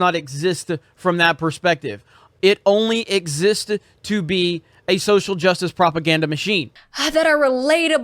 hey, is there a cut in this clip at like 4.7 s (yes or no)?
no